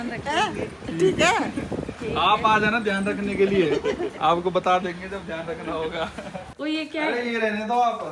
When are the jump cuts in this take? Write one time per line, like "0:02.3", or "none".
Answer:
0:06.4